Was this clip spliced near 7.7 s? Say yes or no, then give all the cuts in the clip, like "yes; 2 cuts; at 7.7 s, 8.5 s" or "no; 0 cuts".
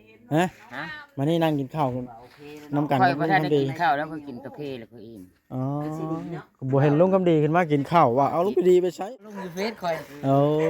no; 1 cut; at 9.0 s